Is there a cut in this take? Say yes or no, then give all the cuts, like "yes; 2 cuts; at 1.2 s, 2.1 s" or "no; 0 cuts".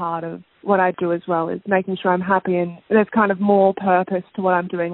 yes; 1 cut; at 2.8 s